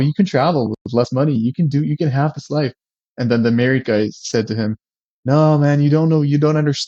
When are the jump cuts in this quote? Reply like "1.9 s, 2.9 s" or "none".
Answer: none

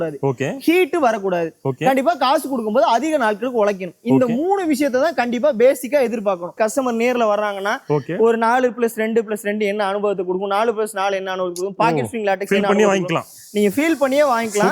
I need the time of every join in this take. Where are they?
6.6 s

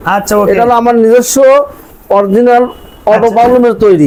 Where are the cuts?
none

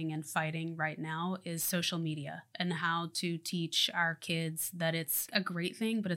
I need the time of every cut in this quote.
5.3 s

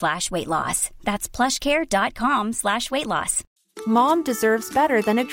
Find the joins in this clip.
3.4 s

